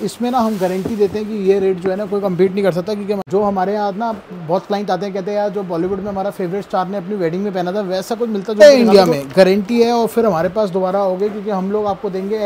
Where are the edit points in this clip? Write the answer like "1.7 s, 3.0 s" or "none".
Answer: 3.2 s, 8.6 s